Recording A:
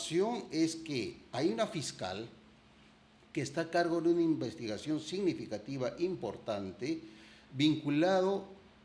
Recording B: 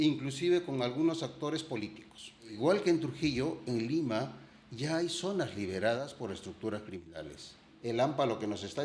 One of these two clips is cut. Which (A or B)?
B